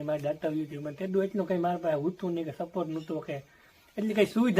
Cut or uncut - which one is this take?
uncut